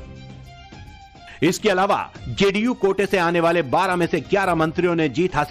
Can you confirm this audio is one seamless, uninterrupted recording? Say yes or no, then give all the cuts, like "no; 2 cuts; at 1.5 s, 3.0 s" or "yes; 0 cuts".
yes; 0 cuts